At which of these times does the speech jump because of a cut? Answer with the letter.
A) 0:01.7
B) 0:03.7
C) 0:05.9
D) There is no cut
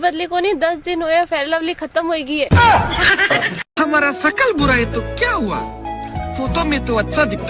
B